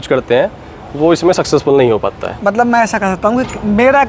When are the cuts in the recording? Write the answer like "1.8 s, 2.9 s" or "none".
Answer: none